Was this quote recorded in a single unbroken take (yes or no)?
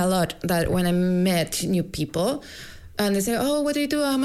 yes